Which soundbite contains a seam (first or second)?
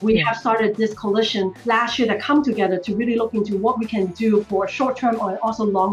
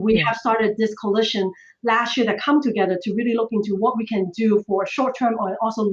first